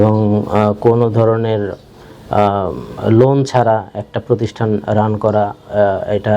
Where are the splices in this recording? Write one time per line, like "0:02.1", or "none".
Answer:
none